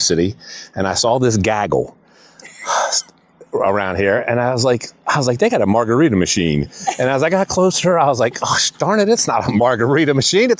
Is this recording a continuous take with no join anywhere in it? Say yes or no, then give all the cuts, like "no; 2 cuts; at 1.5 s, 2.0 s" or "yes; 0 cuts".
yes; 0 cuts